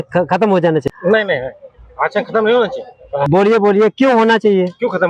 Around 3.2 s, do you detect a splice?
yes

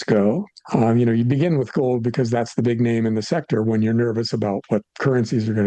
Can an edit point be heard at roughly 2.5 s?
no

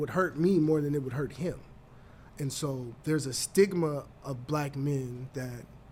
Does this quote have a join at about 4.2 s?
no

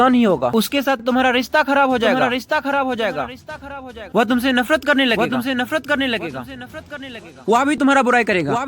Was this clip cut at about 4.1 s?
yes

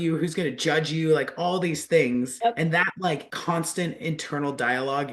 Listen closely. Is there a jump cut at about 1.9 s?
yes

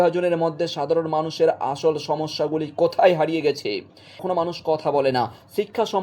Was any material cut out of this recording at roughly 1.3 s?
no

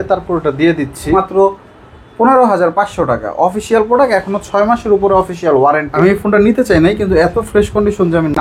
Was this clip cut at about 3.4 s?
no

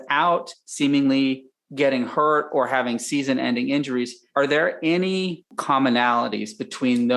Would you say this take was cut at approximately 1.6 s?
no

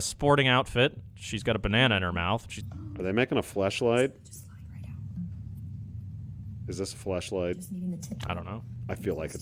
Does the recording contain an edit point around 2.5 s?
no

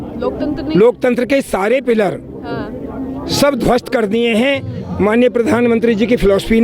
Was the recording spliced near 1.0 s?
no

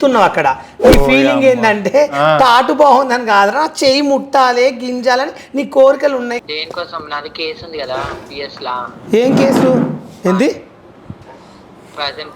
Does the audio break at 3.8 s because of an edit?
no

